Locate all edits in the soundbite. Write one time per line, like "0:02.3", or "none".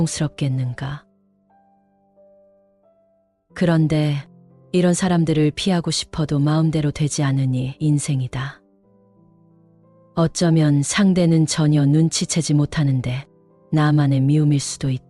0:01.0
0:03.5
0:08.6
0:09.9